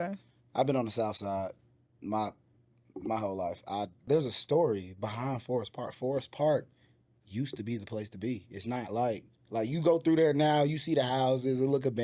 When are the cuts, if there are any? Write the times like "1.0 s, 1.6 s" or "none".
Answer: 4.1 s